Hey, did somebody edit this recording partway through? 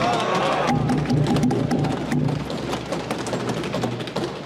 no; 0 cuts

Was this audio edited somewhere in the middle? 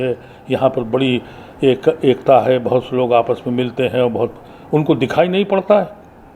no; 0 cuts

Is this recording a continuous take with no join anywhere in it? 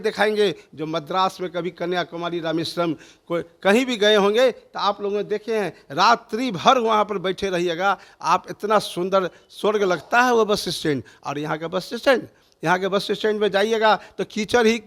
yes; 0 cuts

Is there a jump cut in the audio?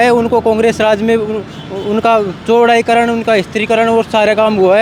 no; 0 cuts

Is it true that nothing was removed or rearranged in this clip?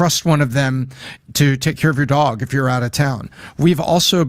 yes; 0 cuts

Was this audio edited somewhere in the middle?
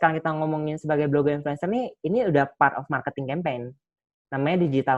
no; 0 cuts

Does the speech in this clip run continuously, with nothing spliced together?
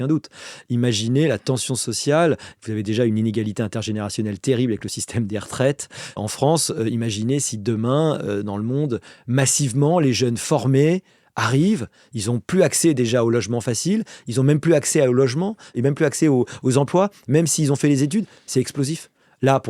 no; 2 cuts; at 6.2 s, 15.7 s

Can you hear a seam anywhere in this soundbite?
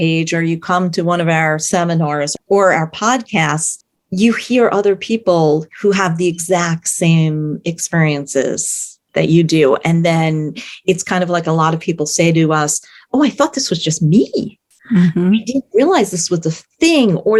no; 0 cuts

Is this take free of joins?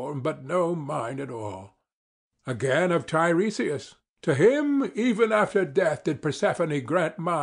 yes; 0 cuts

